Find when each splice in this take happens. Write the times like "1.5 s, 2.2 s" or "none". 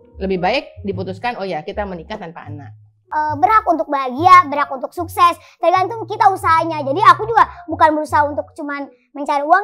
3.0 s

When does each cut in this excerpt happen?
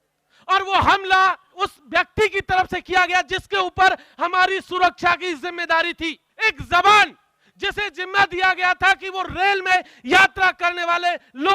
1.5 s, 6.3 s

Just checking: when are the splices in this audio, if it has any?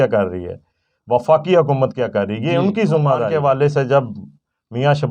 3.3 s

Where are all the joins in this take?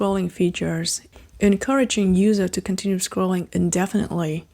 1.0 s

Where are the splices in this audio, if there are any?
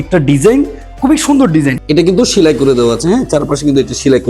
1.8 s

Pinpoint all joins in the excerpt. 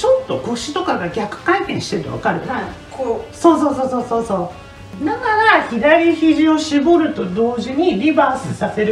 4.9 s

